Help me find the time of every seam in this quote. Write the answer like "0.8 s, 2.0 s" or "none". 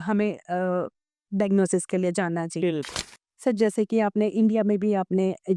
2.9 s